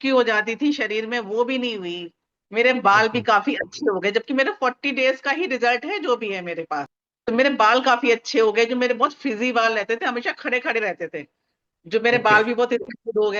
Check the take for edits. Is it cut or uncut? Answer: cut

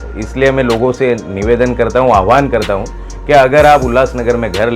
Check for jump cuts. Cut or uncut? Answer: uncut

